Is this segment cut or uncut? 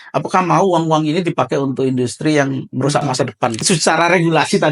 cut